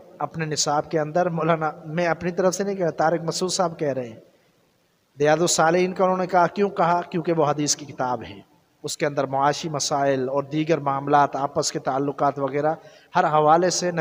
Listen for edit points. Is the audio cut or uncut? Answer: uncut